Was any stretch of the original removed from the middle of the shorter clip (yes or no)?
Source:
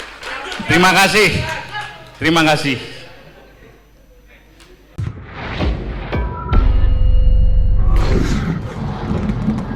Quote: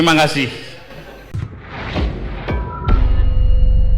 yes